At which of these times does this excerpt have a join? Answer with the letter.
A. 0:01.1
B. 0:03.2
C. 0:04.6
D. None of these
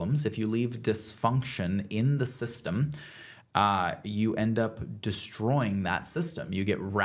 D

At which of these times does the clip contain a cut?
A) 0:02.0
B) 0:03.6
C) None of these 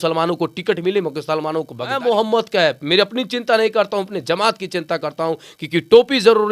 A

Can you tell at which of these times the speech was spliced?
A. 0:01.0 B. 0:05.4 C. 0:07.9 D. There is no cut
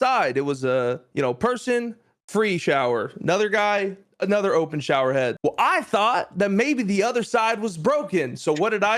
B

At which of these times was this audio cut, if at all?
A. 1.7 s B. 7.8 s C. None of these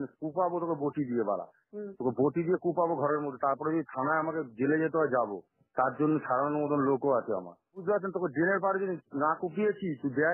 B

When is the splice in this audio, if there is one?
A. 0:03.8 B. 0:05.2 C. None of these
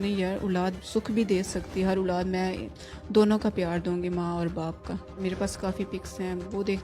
B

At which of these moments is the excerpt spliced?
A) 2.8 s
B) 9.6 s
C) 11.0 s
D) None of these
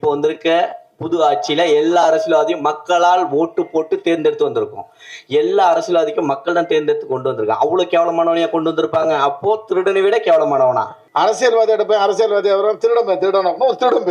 C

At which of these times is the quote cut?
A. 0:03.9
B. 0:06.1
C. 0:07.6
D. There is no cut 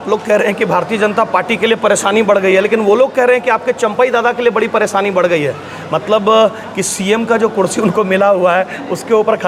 D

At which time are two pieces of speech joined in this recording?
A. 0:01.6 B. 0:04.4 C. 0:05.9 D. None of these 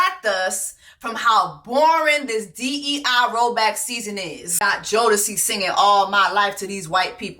B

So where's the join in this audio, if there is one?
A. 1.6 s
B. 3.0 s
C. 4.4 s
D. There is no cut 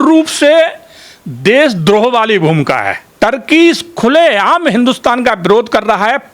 B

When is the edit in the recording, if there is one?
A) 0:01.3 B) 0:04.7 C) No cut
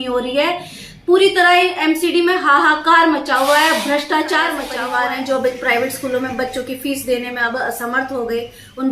B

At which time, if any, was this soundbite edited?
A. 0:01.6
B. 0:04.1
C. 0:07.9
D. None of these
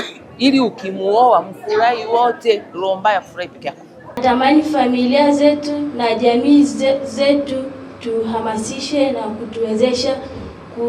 D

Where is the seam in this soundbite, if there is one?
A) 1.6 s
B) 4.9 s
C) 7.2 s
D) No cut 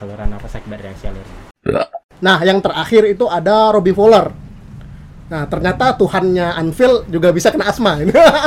A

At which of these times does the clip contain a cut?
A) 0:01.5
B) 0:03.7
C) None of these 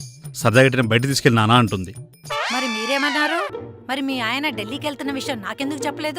B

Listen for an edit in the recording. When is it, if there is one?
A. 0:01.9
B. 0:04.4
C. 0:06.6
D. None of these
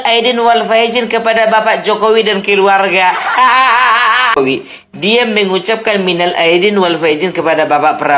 B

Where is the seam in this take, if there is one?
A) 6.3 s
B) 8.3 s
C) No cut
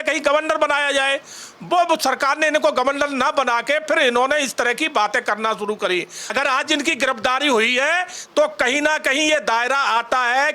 A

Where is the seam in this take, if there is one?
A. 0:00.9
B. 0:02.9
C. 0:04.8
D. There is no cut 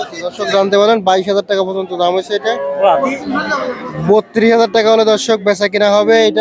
B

